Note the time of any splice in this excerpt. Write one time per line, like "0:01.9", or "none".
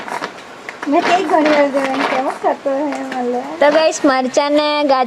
0:03.5